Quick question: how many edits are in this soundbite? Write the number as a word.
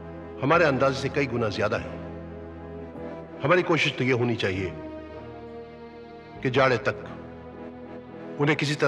one